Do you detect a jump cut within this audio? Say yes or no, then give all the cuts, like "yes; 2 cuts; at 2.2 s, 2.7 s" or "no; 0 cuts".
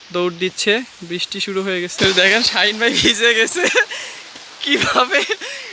yes; 1 cut; at 1.9 s